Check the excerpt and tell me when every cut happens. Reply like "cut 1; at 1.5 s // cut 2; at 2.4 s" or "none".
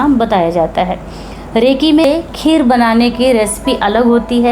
cut 1; at 2.0 s